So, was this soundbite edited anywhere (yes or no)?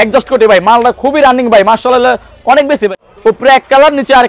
yes